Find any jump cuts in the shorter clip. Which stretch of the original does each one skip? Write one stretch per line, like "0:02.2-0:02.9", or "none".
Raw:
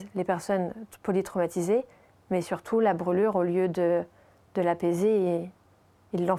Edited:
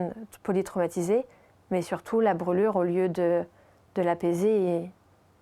none